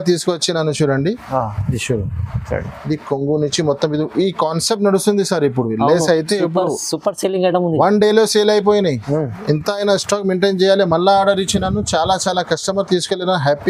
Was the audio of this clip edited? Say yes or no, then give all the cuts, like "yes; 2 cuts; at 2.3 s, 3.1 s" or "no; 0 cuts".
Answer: no; 0 cuts